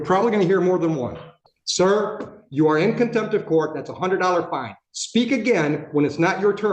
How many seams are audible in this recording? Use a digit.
1